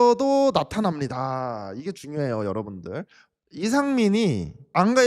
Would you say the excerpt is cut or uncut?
cut